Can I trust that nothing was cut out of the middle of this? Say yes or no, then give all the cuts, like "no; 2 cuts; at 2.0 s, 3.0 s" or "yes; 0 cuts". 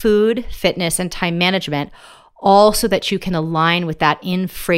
yes; 0 cuts